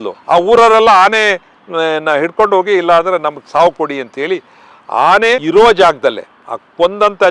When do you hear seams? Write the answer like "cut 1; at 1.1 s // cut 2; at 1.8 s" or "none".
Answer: cut 1; at 5.4 s